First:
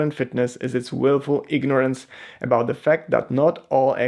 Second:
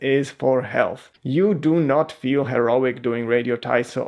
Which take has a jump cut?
second; 1 cut; at 1.1 s

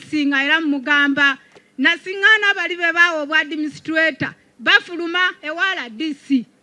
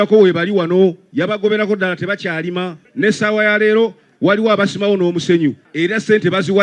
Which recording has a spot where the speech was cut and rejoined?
second; 2 cuts; at 2.8 s, 5.7 s

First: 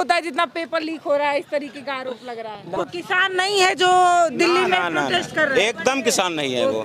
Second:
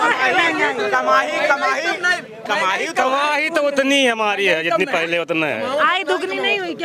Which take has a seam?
first; 1 cut; at 2.6 s

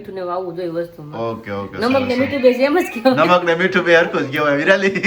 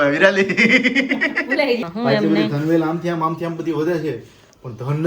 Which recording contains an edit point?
second; 1 cut; at 1.8 s

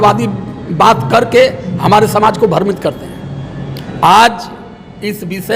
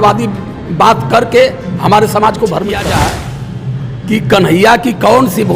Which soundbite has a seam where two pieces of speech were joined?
second; 1 cut; at 2.9 s

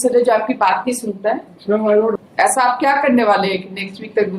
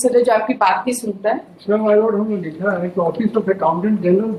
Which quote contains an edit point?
first; 1 cut; at 2.2 s

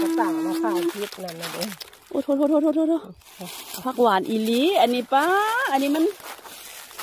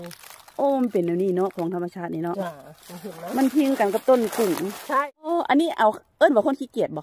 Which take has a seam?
second; 1 cut; at 5.3 s

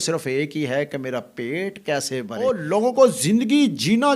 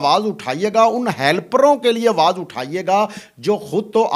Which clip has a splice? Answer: first; 1 cut; at 2.4 s

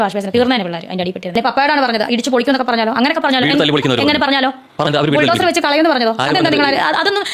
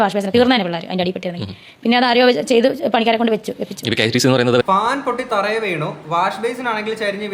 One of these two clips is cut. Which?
first; 2 cuts; at 1.2 s, 4.9 s

